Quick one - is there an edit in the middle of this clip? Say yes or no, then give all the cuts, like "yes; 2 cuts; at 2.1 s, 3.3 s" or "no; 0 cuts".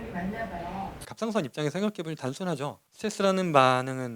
yes; 2 cuts; at 1.0 s, 2.8 s